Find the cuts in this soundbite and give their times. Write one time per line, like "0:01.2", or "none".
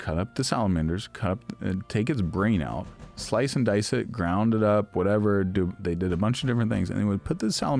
none